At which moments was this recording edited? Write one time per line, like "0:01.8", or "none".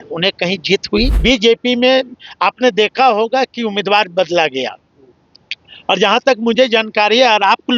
0:01.2